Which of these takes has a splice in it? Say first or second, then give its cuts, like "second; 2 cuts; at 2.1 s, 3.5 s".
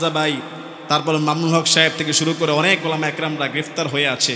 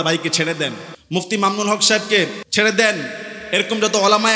second; 2 cuts; at 0.9 s, 2.4 s